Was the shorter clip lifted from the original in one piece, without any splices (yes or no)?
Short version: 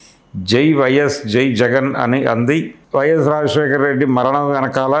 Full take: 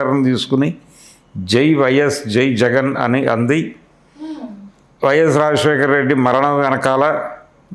no